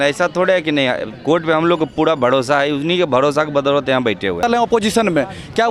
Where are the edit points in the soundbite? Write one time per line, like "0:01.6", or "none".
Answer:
0:04.4